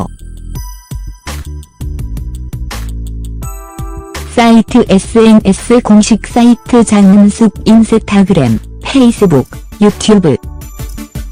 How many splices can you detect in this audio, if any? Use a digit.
0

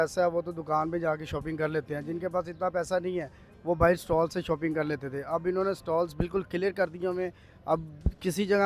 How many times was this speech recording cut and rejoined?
0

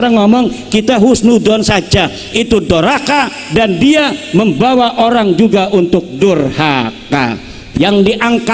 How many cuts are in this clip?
1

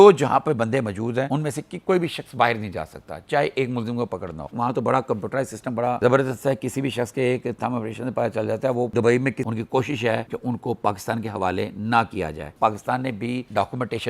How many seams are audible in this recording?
3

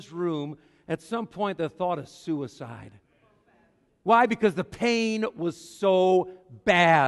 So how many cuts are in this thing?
0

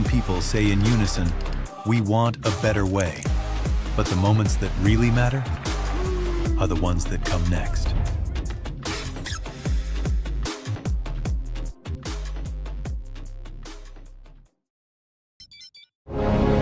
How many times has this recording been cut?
1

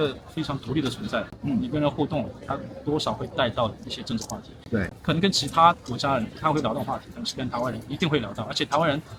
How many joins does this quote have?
0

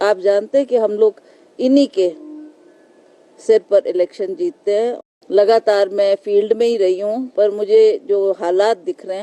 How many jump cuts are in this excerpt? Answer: 1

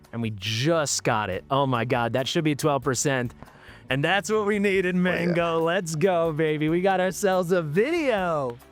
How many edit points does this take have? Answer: 0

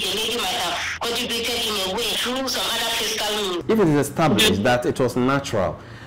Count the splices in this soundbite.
3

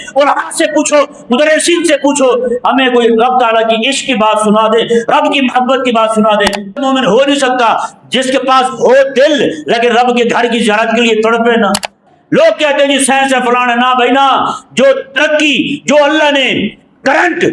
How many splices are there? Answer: 2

